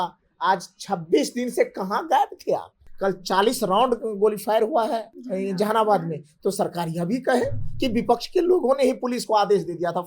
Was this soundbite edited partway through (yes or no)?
yes